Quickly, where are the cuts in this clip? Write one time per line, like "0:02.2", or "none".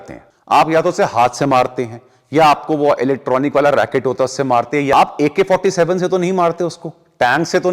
0:04.9

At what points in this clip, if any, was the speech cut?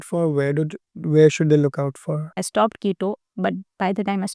0:02.4

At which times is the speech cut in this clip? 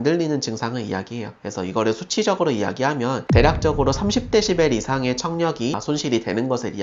none

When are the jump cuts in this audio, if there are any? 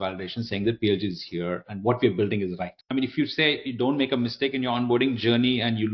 0:03.0

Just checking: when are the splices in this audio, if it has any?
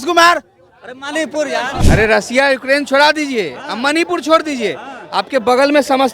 0:01.8

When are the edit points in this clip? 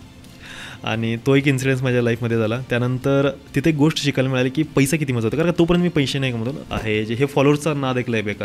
0:06.5

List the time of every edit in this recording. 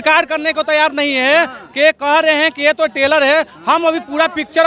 none

